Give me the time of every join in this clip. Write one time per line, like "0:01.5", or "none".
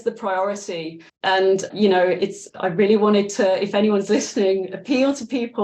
0:01.4
0:02.4